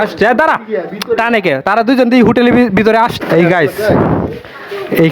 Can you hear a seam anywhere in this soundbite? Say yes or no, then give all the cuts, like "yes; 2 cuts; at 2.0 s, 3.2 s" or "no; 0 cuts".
yes; 1 cut; at 3.2 s